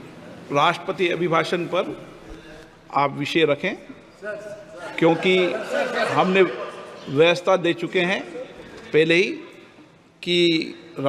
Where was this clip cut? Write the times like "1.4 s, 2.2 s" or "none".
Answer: none